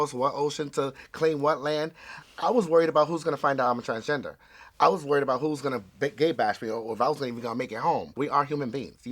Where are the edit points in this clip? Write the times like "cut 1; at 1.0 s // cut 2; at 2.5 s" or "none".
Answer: cut 1; at 8.2 s